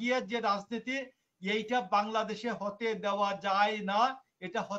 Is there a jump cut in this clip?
no; 0 cuts

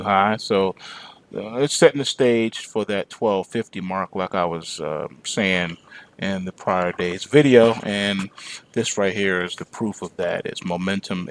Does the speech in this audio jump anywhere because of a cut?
yes; 1 cut; at 9.2 s

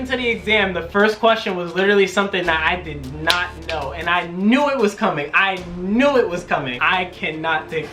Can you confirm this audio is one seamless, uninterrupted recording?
no; 1 cut; at 6.8 s

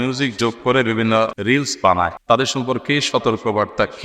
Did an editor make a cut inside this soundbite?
yes; 2 cuts; at 1.4 s, 2.2 s

